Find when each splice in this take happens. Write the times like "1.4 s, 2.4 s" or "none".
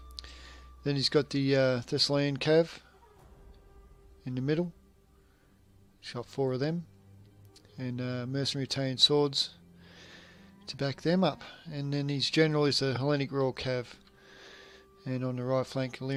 none